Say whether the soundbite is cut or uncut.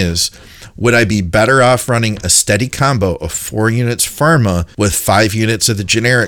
cut